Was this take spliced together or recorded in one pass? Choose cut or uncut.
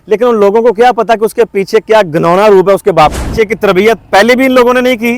cut